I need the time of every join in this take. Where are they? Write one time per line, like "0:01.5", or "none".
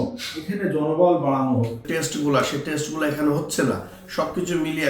0:01.8